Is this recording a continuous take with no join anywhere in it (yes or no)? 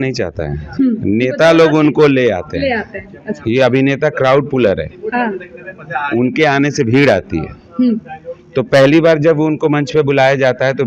yes